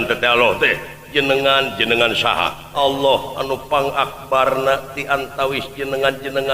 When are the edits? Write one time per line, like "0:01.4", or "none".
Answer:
0:02.6